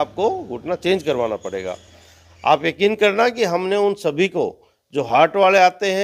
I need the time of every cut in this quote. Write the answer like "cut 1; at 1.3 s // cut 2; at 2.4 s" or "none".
none